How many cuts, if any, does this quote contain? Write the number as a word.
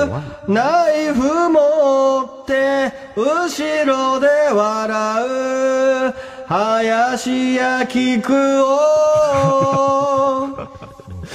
one